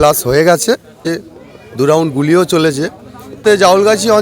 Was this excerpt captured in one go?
no; 2 cuts; at 1.0 s, 3.4 s

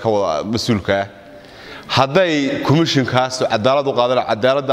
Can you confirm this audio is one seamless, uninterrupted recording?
yes; 0 cuts

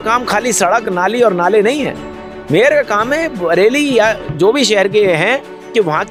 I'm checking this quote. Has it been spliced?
no; 0 cuts

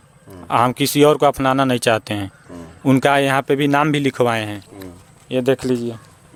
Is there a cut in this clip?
no; 0 cuts

